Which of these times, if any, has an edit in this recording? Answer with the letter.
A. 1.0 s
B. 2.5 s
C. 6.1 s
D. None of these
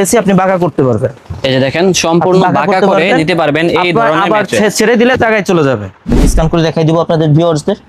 C